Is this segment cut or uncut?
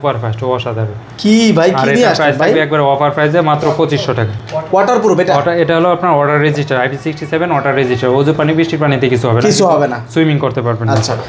uncut